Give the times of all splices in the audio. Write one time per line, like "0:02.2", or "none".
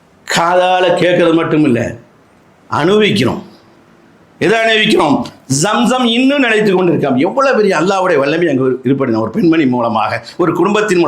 none